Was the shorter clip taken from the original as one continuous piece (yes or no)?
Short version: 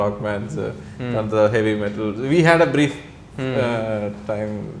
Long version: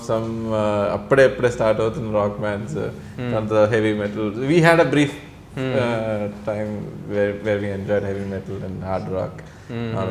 yes